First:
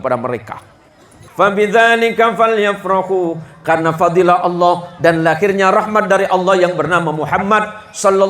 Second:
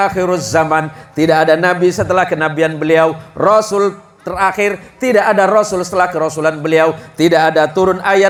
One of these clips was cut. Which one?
first; 1 cut; at 1.2 s

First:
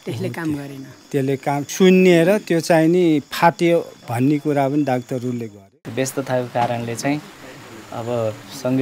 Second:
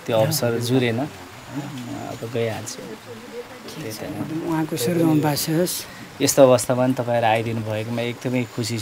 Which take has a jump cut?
first; 2 cuts; at 1.6 s, 5.6 s

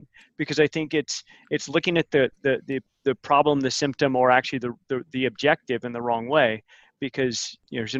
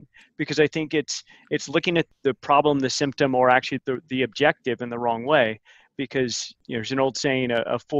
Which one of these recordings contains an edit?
second; 2 cuts; at 2.1 s, 3.8 s

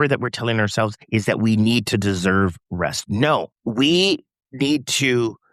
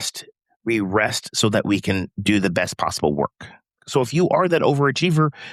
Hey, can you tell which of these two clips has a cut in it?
first; 2 cuts; at 1.0 s, 3.6 s

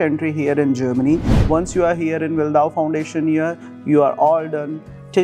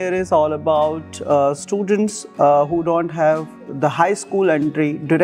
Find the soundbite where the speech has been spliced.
first; 1 cut; at 1.3 s

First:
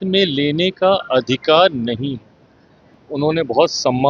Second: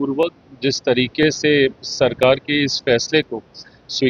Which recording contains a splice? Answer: first; 1 cut; at 3.0 s

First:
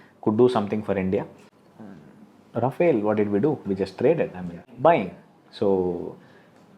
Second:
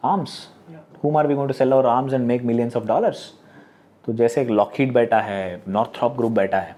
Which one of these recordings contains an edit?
first; 2 cuts; at 1.4 s, 4.7 s

